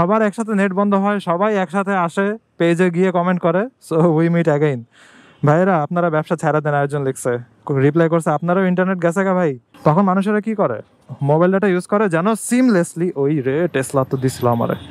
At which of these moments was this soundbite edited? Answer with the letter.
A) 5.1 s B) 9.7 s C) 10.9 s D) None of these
B